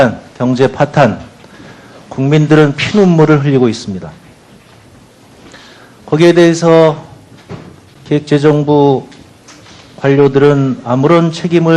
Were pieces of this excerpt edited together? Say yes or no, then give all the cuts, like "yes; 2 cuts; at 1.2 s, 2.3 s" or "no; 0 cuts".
no; 0 cuts